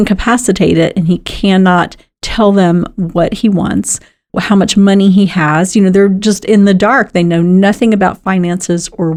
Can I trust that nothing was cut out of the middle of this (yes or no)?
yes